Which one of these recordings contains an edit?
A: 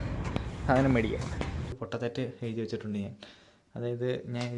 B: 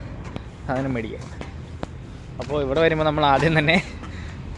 A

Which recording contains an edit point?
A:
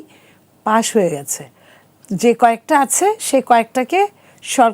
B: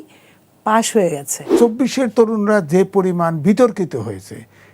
B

